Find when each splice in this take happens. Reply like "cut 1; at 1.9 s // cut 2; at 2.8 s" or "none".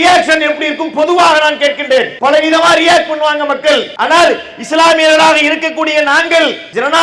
cut 1; at 2.1 s // cut 2; at 3.9 s